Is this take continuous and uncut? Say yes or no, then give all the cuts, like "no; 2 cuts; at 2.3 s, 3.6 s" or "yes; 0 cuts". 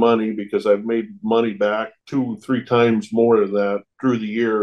yes; 0 cuts